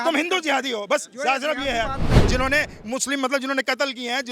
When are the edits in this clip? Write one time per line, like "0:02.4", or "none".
0:02.2